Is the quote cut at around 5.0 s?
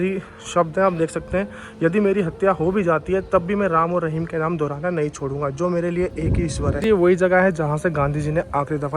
no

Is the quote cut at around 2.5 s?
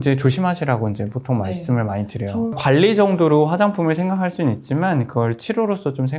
yes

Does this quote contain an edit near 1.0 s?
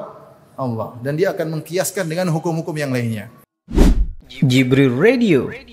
no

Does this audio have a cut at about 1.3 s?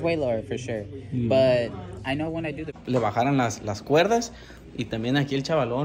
no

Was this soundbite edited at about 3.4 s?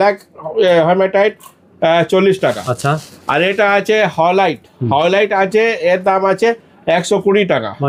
no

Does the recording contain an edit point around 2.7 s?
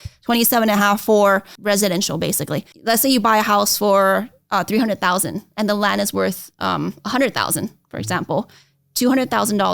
yes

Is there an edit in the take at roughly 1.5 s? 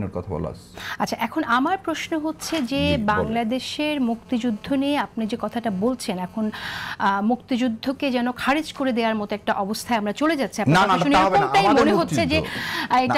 no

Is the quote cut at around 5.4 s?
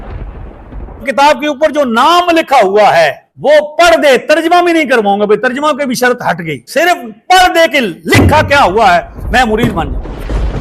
no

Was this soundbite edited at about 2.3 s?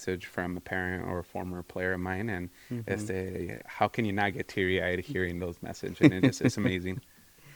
no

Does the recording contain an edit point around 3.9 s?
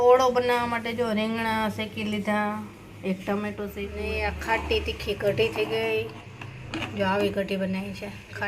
yes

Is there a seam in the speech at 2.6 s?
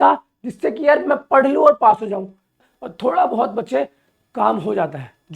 yes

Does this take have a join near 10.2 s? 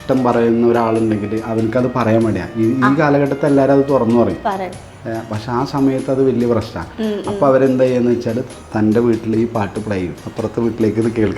yes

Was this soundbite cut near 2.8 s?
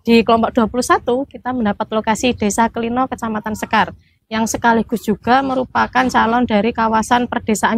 no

